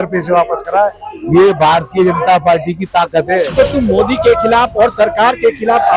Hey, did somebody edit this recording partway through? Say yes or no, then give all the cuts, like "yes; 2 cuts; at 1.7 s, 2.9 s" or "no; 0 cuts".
yes; 1 cut; at 3.5 s